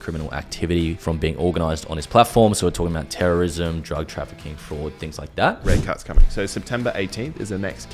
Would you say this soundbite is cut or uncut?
cut